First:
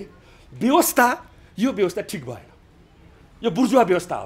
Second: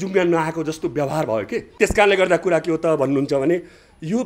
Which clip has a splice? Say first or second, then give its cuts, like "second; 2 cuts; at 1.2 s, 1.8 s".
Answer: second; 1 cut; at 1.7 s